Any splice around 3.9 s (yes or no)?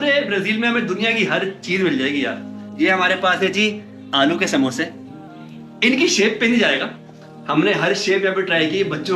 no